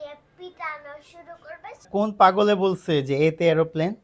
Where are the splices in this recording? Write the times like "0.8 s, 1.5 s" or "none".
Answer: 1.9 s

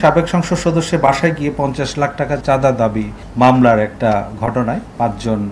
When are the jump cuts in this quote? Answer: 2.4 s, 3.2 s

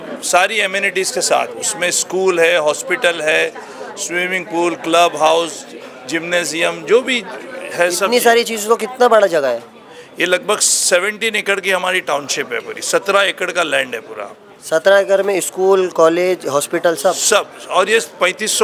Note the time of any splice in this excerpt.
none

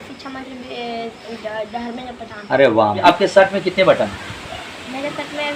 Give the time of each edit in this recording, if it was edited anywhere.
3.0 s

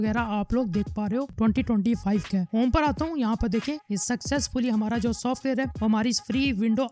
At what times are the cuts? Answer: 2.5 s

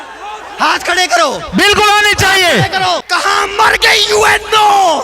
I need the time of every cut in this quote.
3.1 s

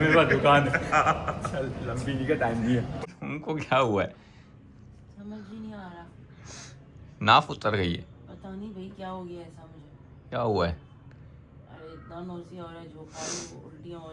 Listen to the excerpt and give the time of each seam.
3.1 s

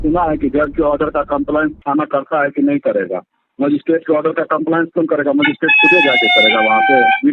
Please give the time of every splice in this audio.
none

